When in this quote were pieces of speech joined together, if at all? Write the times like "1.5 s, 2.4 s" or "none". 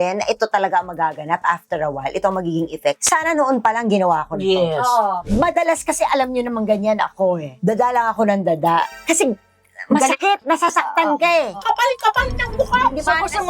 5.2 s, 8.9 s, 11.6 s